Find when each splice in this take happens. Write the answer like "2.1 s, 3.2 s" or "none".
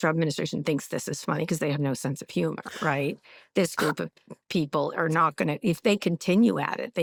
none